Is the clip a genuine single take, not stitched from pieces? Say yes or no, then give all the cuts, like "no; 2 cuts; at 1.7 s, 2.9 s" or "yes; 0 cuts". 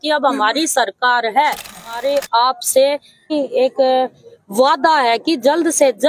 no; 2 cuts; at 2.0 s, 3.3 s